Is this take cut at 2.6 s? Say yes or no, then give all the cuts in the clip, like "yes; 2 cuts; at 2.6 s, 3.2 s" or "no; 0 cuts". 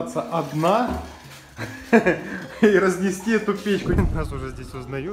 no; 1 cut; at 4.0 s